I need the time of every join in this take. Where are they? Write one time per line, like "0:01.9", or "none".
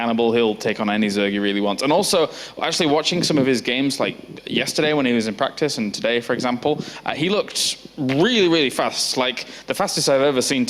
none